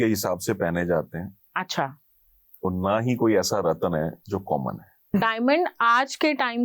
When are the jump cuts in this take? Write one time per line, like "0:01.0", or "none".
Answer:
0:05.1